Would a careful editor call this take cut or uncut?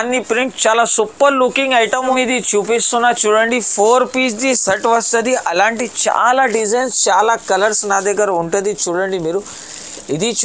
cut